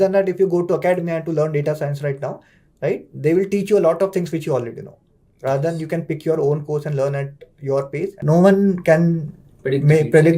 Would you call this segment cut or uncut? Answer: cut